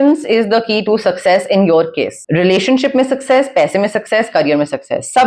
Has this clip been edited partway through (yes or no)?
yes